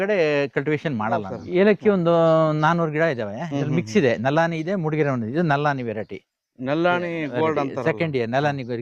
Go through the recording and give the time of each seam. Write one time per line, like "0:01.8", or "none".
0:01.4